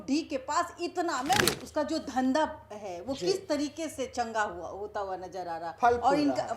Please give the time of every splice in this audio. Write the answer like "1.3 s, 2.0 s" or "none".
1.4 s